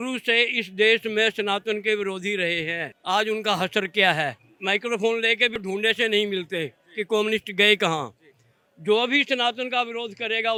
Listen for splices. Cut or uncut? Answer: uncut